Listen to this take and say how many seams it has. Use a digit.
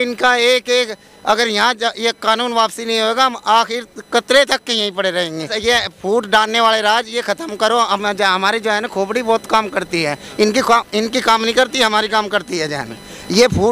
1